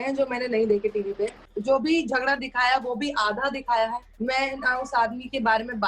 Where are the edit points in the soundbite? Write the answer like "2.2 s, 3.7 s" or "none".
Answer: 1.5 s, 4.1 s